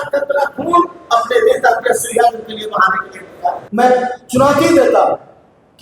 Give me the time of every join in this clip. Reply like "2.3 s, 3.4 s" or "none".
3.6 s